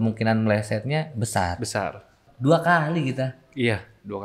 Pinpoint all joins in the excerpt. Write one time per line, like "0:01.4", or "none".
0:02.3